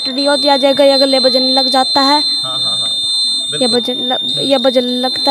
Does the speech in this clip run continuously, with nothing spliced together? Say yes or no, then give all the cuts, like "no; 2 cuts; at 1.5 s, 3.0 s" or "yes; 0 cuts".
yes; 0 cuts